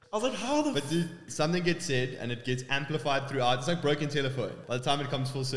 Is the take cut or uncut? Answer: cut